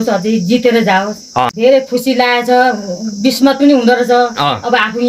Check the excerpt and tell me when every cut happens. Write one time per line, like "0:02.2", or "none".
0:01.5